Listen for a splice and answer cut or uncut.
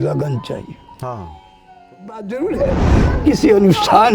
cut